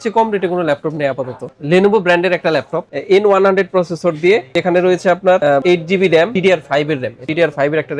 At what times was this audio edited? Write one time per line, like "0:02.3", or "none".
none